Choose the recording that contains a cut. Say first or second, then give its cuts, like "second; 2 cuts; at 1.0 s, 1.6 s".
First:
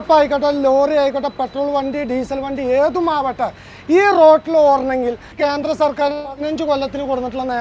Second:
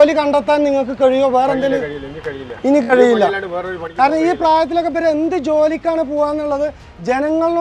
first; 1 cut; at 5.2 s